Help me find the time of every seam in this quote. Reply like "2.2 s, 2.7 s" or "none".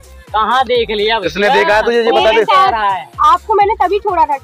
none